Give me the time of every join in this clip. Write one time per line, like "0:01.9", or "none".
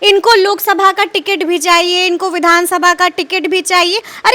none